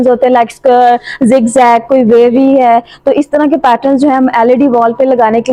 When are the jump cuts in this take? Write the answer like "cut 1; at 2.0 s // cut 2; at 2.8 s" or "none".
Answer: none